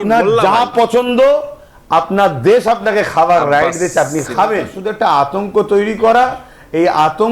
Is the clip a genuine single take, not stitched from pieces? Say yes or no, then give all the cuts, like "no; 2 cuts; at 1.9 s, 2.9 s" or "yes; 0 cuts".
no; 1 cut; at 4.8 s